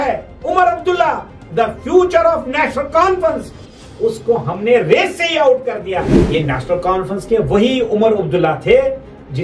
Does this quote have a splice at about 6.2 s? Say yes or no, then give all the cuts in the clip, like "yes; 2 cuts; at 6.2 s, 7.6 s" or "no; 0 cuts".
yes; 1 cut; at 6.2 s